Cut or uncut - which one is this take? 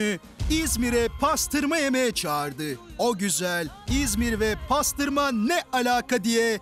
uncut